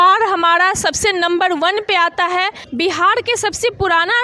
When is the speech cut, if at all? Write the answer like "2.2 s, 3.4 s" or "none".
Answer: 2.6 s